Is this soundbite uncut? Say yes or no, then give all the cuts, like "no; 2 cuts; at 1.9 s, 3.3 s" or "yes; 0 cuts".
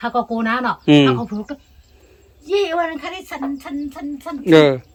yes; 0 cuts